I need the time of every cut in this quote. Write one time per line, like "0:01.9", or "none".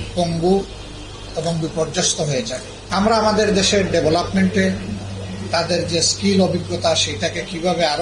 0:02.7